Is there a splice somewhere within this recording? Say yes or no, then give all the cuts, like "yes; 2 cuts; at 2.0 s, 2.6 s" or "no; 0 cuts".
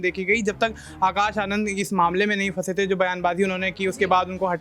no; 0 cuts